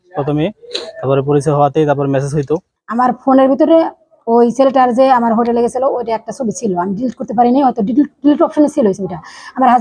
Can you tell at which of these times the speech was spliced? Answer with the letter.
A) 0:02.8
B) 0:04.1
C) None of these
A